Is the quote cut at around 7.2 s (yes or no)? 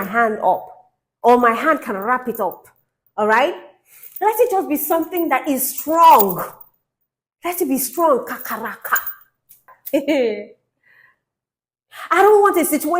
no